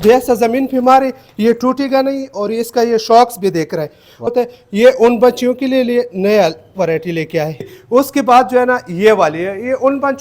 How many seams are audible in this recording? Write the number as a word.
two